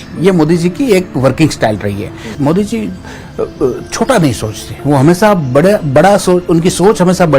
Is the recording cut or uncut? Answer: cut